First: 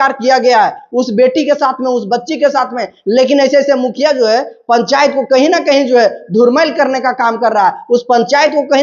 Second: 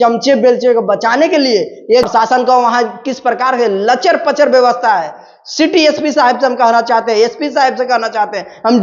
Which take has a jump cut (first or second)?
second